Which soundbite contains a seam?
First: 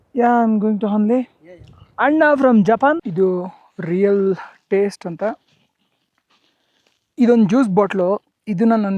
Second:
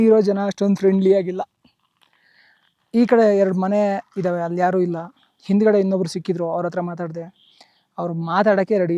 first; 1 cut; at 3.1 s

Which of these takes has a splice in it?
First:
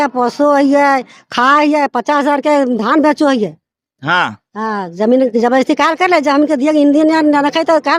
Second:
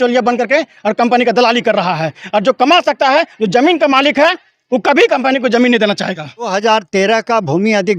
second; 1 cut; at 6.5 s

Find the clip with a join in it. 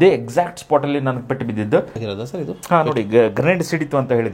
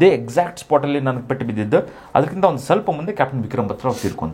first; 1 cut; at 2.0 s

